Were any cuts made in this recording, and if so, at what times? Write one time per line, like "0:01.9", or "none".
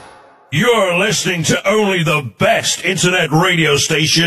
none